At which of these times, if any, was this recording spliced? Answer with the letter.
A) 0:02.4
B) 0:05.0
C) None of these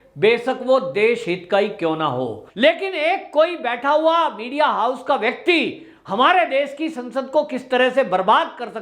A